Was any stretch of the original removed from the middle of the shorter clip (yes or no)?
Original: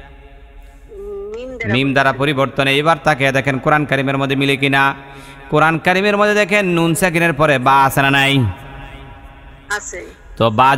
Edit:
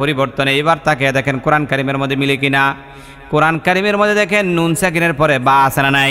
no